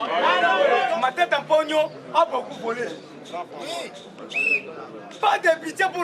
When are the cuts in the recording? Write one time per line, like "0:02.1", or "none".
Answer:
0:00.9